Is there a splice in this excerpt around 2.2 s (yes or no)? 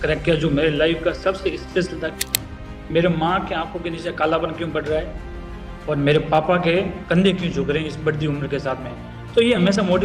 yes